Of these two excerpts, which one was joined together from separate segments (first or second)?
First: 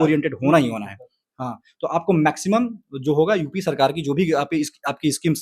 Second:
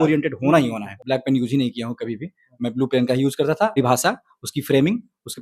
second